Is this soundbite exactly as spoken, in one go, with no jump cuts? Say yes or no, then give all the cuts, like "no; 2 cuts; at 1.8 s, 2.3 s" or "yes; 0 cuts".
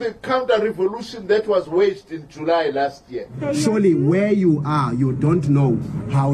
no; 1 cut; at 3.3 s